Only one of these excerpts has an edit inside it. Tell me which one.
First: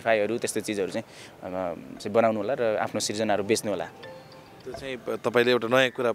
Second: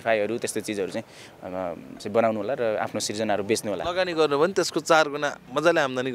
second; 1 cut; at 3.8 s

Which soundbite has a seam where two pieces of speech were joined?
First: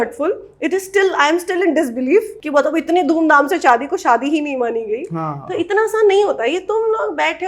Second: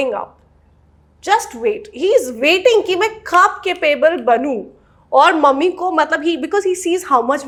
first; 1 cut; at 2.4 s

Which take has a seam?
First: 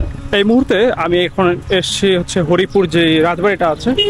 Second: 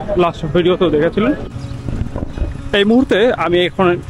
second; 1 cut; at 1.4 s

